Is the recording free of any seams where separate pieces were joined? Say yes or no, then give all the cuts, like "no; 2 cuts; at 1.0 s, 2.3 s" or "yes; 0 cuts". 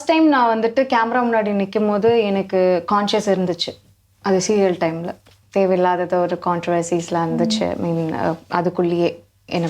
no; 1 cut; at 5.3 s